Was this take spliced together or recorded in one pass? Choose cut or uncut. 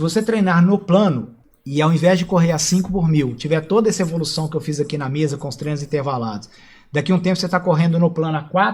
uncut